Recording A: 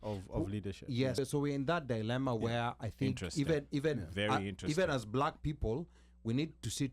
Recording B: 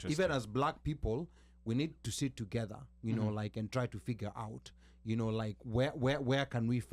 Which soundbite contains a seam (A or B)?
A